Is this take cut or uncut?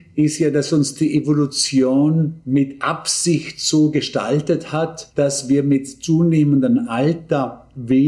cut